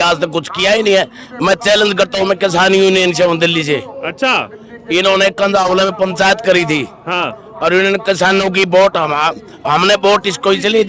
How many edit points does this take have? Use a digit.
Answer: 0